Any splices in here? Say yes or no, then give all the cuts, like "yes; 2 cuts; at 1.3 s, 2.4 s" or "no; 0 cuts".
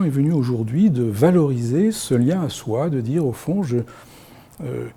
no; 0 cuts